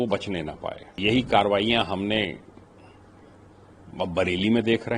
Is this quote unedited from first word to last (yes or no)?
no